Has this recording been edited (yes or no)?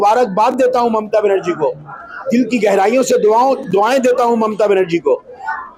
no